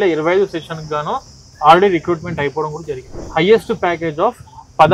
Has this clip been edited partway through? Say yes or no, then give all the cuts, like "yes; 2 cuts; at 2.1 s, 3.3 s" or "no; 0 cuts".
yes; 1 cut; at 3.2 s